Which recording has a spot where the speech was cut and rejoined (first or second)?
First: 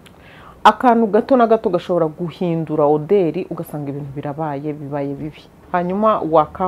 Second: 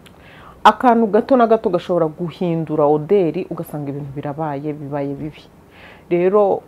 first